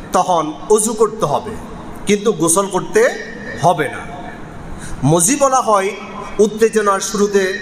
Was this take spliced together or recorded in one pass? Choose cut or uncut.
uncut